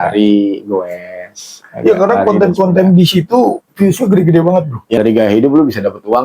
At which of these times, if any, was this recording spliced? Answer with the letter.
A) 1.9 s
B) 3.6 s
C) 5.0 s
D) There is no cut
C